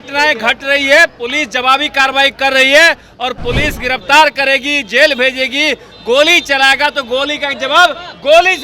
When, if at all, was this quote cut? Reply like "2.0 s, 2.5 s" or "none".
none